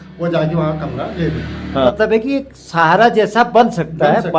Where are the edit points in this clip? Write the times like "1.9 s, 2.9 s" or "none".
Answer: 1.9 s